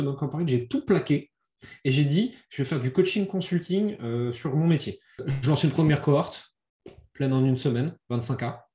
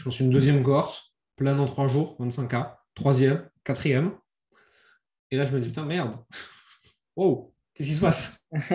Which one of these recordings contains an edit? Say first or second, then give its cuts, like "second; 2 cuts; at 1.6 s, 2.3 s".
first; 1 cut; at 5.3 s